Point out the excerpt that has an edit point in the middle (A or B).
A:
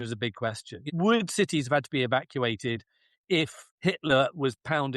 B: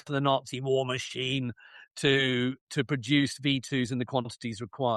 A